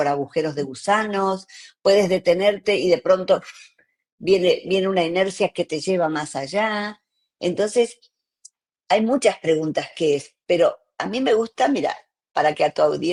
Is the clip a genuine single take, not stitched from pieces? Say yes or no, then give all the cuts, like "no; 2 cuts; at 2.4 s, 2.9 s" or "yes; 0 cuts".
yes; 0 cuts